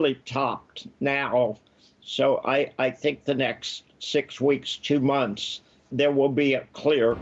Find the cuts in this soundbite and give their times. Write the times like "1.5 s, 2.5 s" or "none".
5.9 s